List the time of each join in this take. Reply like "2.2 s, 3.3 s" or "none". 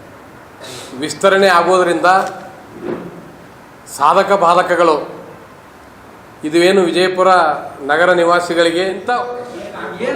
9.1 s